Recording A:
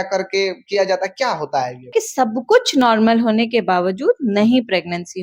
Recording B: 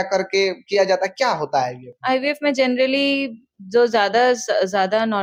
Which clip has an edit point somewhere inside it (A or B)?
A